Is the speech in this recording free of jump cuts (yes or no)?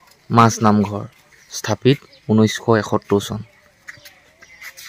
yes